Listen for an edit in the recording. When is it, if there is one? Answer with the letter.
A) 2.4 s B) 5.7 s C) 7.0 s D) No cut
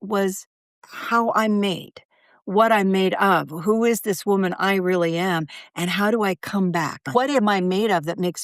C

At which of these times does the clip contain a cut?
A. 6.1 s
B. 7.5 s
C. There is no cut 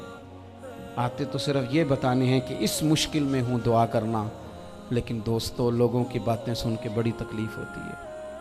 B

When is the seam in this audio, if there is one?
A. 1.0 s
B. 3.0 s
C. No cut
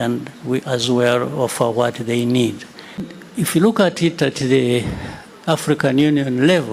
B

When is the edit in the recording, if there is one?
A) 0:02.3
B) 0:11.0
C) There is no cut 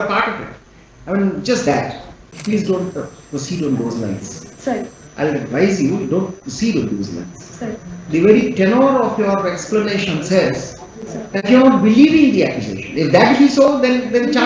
A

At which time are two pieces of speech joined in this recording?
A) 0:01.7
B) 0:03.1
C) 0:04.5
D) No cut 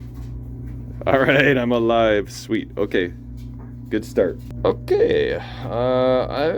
C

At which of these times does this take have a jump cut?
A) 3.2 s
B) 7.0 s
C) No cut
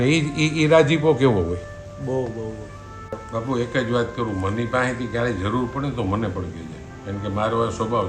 A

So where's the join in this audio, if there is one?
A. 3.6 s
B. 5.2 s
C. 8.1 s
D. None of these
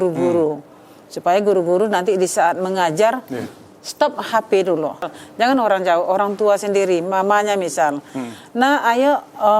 B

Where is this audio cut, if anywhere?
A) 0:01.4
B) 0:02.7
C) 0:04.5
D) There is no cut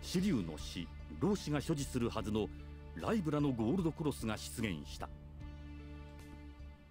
C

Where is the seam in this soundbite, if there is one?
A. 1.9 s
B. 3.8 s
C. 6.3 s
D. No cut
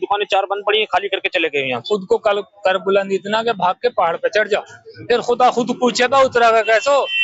A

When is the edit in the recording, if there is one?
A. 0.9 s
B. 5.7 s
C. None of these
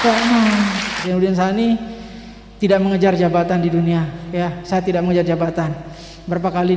A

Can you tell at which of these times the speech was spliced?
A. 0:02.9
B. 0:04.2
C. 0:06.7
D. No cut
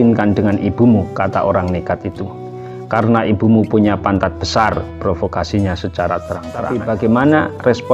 C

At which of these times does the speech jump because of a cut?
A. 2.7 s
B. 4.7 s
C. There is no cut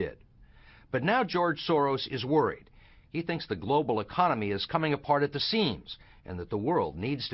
B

